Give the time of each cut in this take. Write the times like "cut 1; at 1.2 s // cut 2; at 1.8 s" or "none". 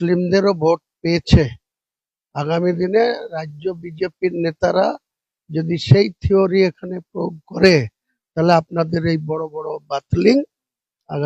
none